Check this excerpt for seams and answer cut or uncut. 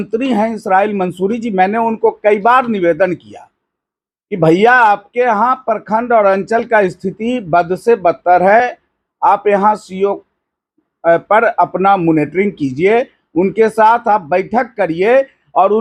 uncut